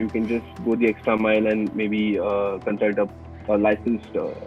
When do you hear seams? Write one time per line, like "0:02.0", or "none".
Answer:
none